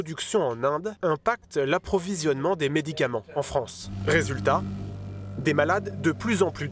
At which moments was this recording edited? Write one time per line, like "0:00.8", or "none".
0:00.9
0:03.9

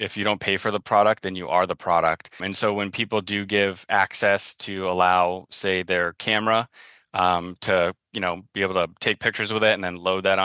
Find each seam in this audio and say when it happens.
0:02.4

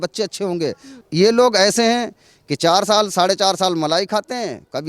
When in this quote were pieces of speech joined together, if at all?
0:01.0

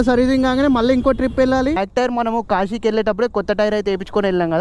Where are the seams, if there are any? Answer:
0:01.8

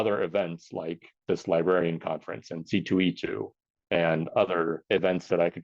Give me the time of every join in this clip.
0:01.1
0:04.8

